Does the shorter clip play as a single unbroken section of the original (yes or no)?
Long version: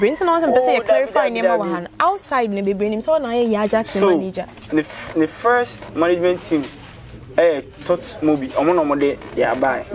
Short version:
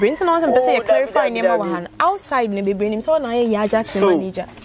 yes